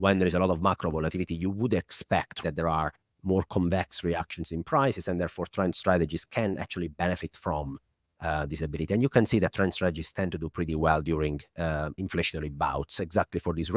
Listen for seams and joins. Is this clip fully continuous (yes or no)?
no